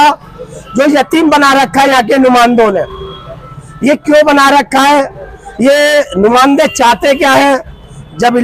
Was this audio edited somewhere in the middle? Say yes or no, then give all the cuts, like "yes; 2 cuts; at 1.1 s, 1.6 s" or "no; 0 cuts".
no; 0 cuts